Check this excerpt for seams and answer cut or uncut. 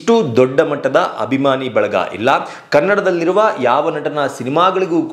uncut